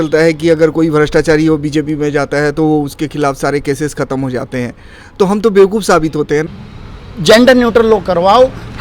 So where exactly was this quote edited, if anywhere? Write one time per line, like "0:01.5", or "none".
0:06.5